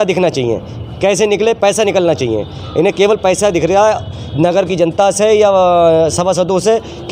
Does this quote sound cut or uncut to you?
uncut